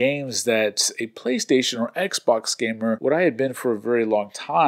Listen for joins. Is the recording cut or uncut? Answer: cut